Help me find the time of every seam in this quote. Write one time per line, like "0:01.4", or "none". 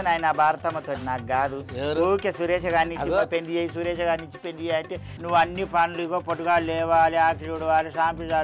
0:05.1